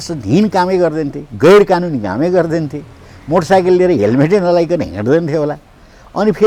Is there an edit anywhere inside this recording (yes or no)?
no